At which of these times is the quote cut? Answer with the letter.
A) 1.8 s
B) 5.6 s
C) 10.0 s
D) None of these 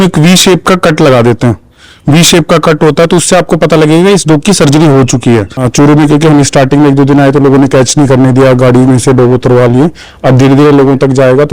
B